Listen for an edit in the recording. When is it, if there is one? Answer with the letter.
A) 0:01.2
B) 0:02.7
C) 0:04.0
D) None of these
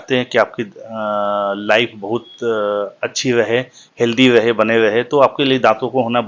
D